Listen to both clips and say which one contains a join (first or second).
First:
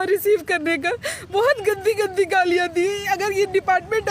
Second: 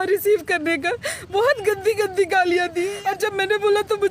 second